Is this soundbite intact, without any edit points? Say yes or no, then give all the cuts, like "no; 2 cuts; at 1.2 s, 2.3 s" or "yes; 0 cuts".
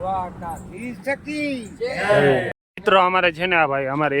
no; 1 cut; at 2.5 s